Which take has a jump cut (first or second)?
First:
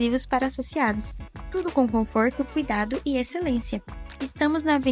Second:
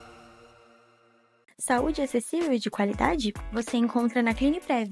second